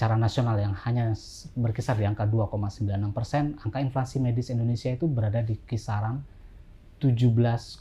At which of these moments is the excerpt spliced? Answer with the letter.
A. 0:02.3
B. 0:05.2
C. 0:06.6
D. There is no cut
D